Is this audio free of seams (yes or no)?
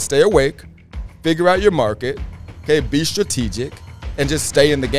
yes